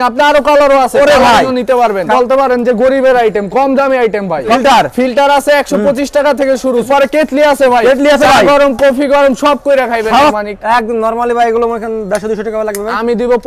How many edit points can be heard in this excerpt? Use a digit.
4